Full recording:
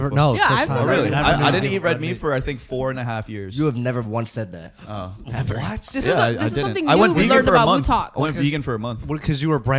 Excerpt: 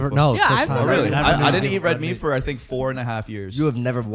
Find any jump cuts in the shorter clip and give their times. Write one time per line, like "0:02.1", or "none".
none